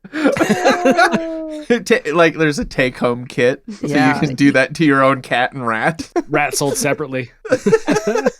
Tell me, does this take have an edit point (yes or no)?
yes